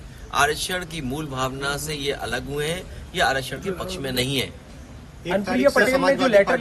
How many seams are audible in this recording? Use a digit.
0